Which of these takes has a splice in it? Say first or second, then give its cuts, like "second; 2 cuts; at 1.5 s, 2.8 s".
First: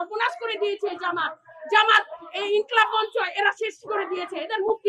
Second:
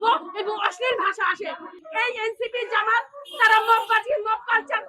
second; 1 cut; at 1.7 s